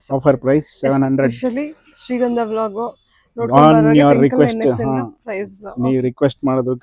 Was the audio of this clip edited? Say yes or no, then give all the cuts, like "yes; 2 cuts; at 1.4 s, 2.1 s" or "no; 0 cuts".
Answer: no; 0 cuts